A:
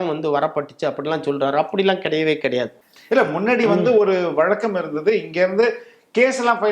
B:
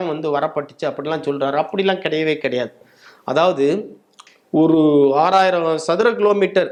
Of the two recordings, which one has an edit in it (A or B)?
A